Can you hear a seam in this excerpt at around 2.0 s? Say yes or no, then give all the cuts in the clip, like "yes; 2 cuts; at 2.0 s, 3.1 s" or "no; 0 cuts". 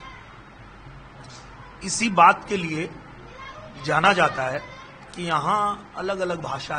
no; 0 cuts